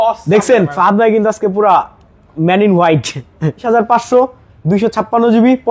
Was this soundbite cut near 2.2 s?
no; 1 cut; at 3.6 s

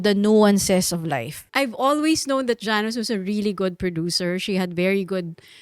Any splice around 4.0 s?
no; 1 cut; at 1.5 s

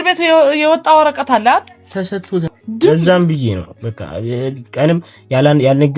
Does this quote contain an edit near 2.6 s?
yes; 1 cut; at 2.6 s

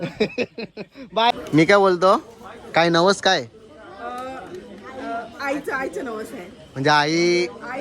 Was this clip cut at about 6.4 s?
no; 1 cut; at 1.3 s

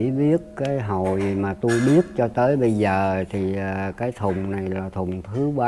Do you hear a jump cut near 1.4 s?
no; 0 cuts

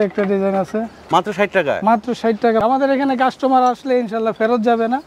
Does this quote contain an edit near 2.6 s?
yes; 1 cut; at 2.6 s

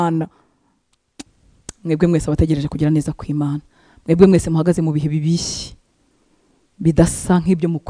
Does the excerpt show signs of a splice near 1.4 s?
yes; 1 cut; at 1.4 s

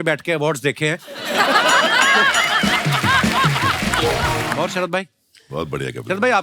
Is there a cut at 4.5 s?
yes; 1 cut; at 4.5 s

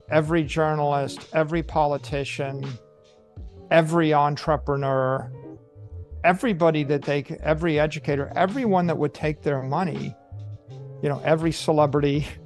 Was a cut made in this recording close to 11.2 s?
no; 0 cuts

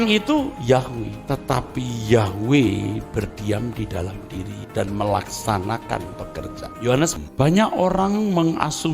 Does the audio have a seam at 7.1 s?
yes; 1 cut; at 7.1 s

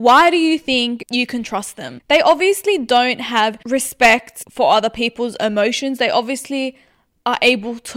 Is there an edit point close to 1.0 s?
yes; 3 cuts; at 1.0 s, 3.6 s, 4.4 s

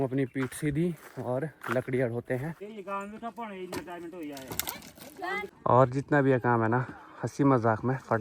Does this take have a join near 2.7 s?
yes; 2 cuts; at 2.7 s, 5.5 s

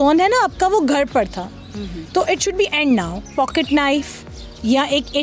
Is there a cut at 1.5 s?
no; 1 cut; at 3.2 s

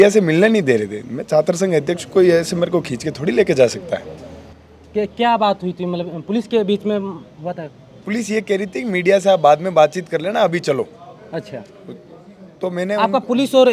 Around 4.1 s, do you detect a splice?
no; 0 cuts

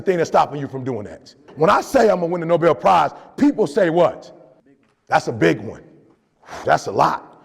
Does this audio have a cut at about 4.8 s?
no; 1 cut; at 1.4 s

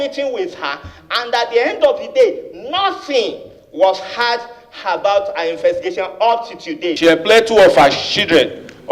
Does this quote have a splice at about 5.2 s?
no; 1 cut; at 6.9 s

